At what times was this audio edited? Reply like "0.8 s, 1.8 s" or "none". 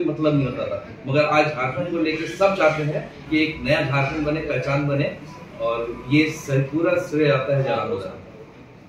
none

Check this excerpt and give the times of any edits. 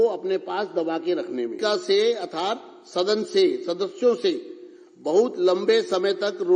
1.6 s

